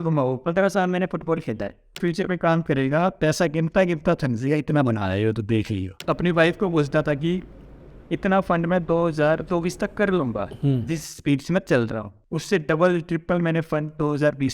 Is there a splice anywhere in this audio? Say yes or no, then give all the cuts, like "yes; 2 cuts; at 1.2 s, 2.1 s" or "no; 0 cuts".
yes; 3 cuts; at 2.0 s, 5.9 s, 12.1 s